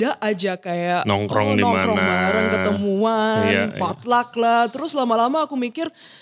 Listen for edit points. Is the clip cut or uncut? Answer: uncut